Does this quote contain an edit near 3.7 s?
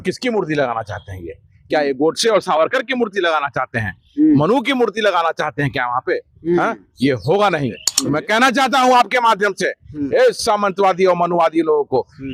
no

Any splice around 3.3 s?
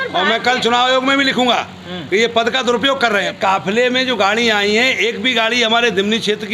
yes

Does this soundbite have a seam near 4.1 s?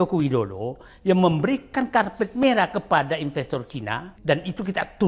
yes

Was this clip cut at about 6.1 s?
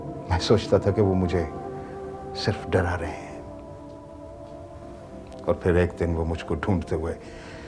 no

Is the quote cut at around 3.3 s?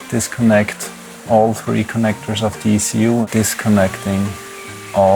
yes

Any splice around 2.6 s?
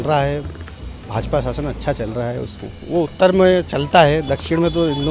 yes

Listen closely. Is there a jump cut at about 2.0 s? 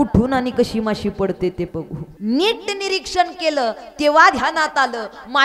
yes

